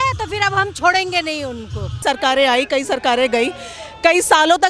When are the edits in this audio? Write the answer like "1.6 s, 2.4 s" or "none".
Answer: 2.0 s